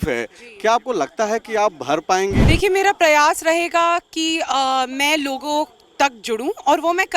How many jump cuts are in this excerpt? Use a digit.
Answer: 1